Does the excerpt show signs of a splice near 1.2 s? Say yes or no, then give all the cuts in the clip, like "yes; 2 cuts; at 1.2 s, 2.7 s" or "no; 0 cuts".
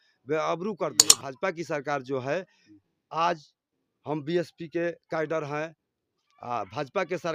yes; 1 cut; at 1.2 s